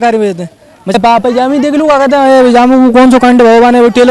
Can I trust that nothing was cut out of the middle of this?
no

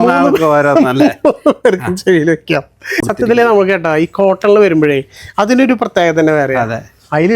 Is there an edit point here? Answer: yes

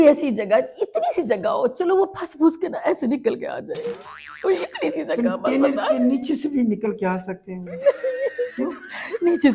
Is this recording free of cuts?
yes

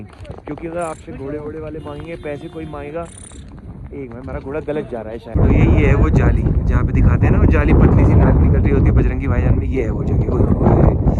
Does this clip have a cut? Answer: yes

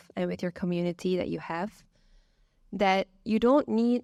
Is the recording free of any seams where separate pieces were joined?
yes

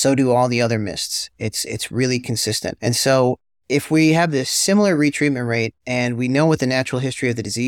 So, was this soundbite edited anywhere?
yes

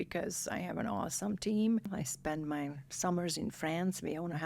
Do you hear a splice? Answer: yes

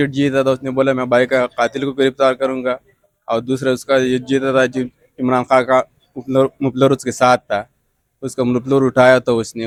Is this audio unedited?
yes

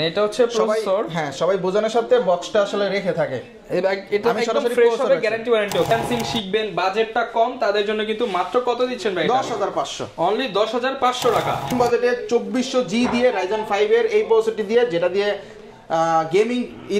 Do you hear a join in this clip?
yes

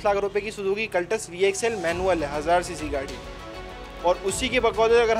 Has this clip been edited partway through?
no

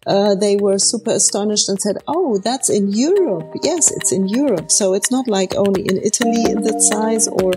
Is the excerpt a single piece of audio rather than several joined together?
yes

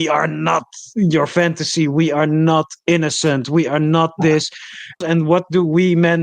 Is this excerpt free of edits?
no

